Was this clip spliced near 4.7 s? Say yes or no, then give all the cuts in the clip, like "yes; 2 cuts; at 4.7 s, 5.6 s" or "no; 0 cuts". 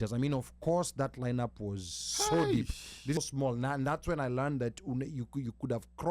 no; 1 cut; at 3.2 s